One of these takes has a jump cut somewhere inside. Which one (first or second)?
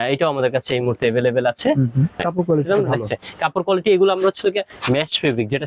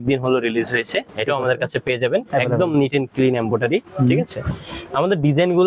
first